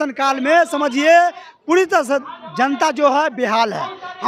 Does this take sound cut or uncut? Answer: uncut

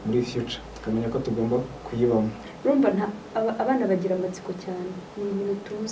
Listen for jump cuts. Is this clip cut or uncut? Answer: cut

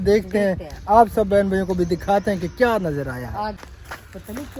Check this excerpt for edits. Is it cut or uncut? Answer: cut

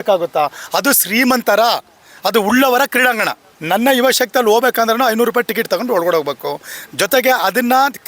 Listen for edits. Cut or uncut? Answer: cut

